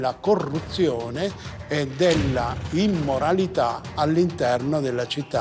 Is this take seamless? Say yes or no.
yes